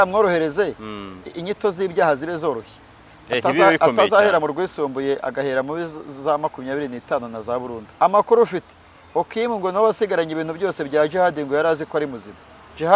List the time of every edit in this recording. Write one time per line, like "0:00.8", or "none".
0:07.8